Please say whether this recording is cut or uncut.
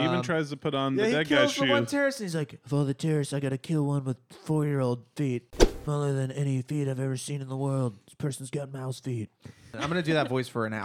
cut